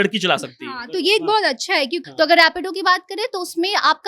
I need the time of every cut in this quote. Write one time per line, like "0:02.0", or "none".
0:02.0